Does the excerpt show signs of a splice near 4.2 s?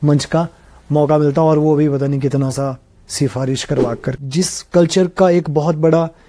yes; 1 cut; at 4.2 s

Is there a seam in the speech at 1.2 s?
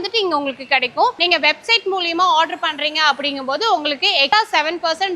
yes; 1 cut; at 1.2 s

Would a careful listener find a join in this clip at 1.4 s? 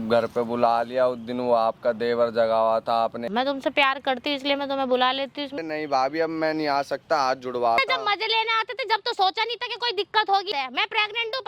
no; 4 cuts; at 3.2 s, 5.6 s, 7.8 s, 10.5 s

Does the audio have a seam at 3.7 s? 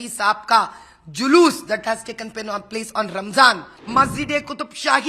yes; 1 cut; at 3.7 s

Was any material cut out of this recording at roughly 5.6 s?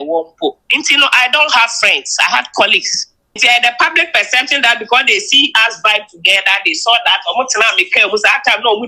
no; 1 cut; at 3.4 s

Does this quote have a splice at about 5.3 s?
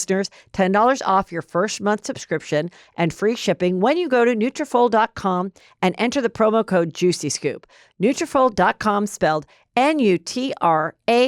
no; 0 cuts

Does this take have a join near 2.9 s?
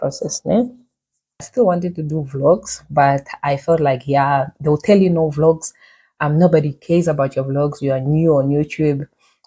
no; 1 cut; at 1.5 s

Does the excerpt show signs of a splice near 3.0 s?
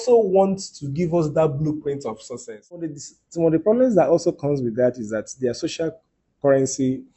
yes; 1 cut; at 3.0 s

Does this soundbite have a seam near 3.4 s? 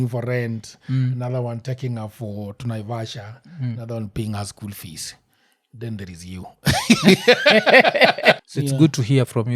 no; 1 cut; at 8.4 s

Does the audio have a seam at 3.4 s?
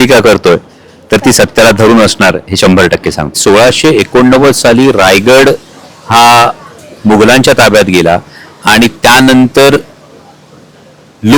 yes; 1 cut; at 3.4 s

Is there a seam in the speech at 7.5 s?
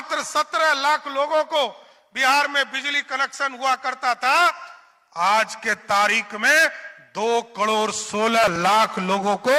no; 0 cuts

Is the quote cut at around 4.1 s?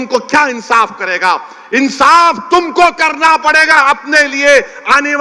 no; 0 cuts

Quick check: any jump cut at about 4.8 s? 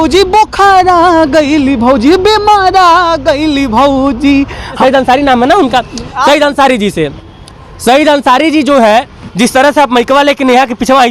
yes; 1 cut; at 4.8 s

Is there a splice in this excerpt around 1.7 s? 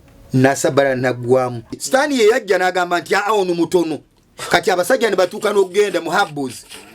yes; 1 cut; at 1.7 s

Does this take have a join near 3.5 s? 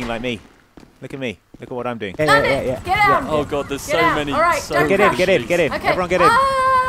no; 1 cut; at 2.2 s

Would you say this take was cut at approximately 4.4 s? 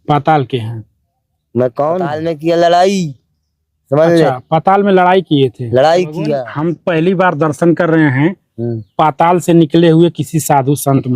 no; 2 cuts; at 2.2 s, 6.5 s

